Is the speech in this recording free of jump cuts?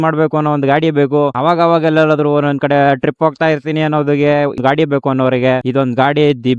no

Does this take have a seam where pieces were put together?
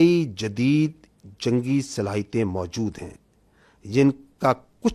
no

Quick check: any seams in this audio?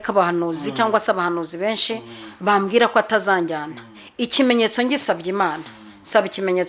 no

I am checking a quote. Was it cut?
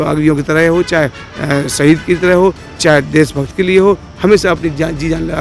no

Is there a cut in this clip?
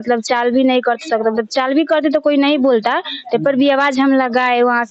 no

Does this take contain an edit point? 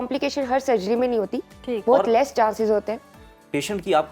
no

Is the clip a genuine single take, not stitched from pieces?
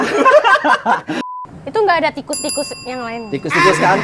no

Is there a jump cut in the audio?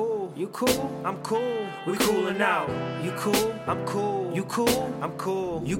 no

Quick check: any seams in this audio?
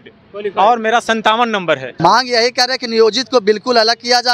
yes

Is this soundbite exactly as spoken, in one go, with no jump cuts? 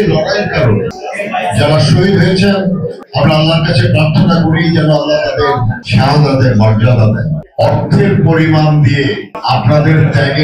no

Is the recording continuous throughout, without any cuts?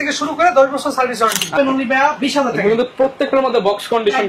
no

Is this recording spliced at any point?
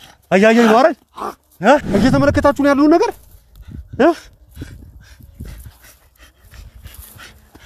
yes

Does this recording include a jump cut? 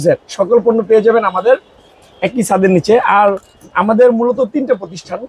no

